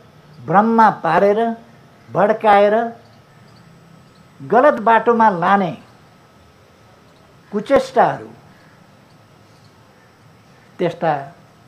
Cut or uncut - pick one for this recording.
uncut